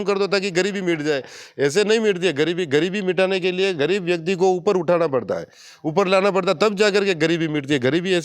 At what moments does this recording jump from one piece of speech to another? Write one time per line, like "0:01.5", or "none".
none